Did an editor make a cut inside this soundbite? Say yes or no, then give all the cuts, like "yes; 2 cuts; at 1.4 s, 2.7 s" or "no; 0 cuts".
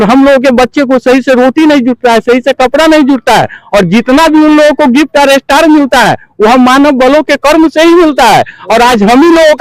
no; 0 cuts